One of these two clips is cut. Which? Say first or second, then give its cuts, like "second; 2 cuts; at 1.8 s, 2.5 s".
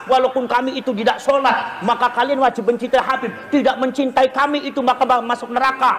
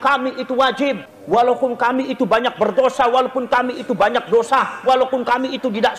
second; 1 cut; at 1.1 s